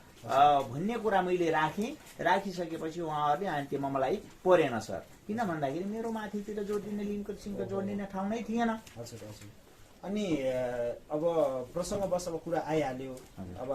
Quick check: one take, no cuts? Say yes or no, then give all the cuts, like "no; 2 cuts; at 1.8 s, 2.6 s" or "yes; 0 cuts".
yes; 0 cuts